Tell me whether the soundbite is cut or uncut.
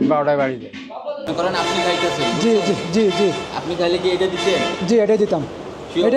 cut